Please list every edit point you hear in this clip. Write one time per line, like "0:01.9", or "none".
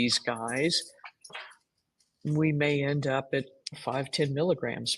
0:01.2